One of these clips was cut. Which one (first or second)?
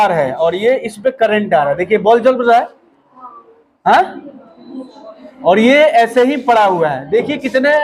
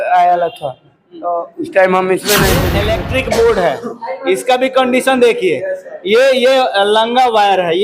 second